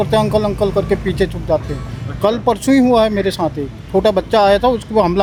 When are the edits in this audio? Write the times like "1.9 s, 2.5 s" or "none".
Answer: none